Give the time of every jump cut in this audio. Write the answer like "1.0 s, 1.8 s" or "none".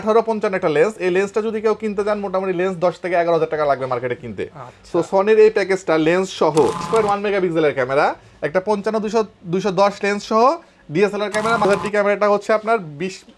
6.8 s, 11.6 s